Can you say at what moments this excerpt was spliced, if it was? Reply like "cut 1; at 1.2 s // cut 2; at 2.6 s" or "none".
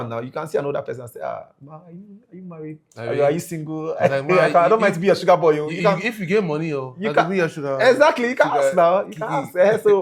none